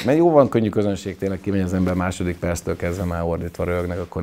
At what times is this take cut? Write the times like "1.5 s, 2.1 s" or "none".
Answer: none